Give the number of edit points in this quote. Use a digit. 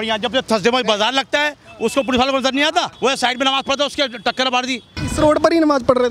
2